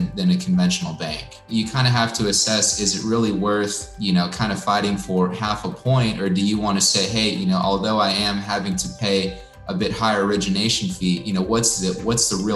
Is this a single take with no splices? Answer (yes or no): no